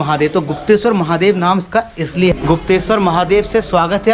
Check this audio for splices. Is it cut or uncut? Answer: cut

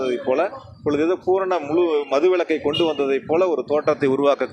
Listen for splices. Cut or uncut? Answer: uncut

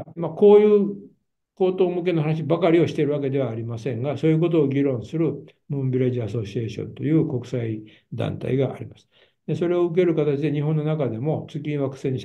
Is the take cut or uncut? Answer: uncut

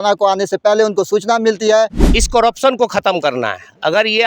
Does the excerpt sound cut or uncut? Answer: cut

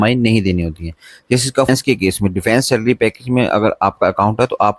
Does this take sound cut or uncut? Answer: cut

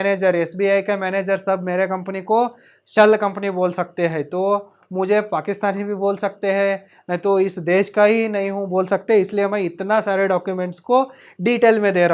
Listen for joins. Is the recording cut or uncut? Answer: uncut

